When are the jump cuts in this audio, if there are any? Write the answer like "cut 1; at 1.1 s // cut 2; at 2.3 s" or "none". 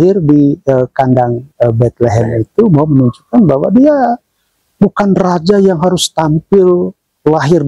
none